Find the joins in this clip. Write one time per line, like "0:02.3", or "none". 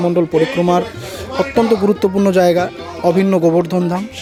none